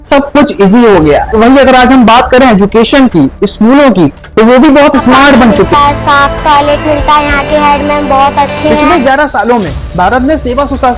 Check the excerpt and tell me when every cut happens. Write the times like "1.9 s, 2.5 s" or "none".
1.3 s, 5.7 s, 8.8 s